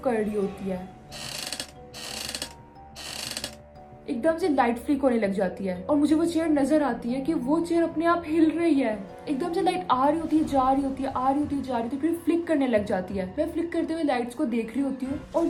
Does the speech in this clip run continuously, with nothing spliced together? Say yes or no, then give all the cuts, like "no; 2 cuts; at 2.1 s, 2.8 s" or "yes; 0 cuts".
yes; 0 cuts